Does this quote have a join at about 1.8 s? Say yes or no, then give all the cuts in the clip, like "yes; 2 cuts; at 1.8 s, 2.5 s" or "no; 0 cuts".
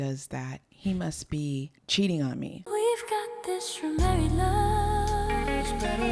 yes; 2 cuts; at 1.8 s, 2.6 s